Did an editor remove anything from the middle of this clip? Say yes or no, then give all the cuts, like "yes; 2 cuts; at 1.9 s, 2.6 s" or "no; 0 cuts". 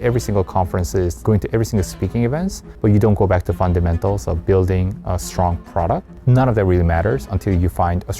yes; 3 cuts; at 1.2 s, 2.6 s, 6.1 s